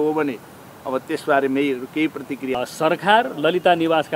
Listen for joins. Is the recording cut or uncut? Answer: cut